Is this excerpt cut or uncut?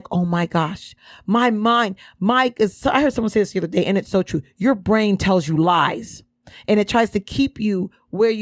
uncut